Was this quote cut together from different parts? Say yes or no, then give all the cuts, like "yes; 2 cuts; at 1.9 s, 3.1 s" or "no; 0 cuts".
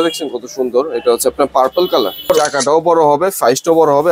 yes; 1 cut; at 2.3 s